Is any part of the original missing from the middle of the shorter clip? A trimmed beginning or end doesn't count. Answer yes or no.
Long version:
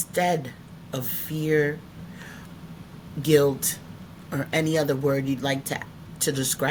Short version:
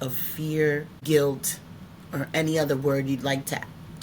yes